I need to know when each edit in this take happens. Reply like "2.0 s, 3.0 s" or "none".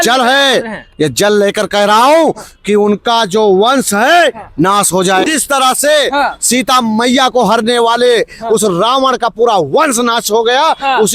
5.2 s